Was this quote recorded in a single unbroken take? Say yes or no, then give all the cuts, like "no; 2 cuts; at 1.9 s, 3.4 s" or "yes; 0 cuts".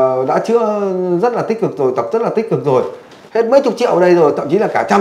yes; 0 cuts